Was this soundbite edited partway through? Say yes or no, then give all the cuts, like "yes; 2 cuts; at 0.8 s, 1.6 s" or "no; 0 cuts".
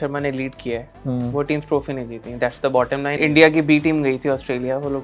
yes; 1 cut; at 3.2 s